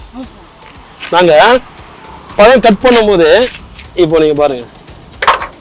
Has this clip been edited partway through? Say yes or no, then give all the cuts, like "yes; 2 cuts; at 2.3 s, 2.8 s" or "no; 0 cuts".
no; 0 cuts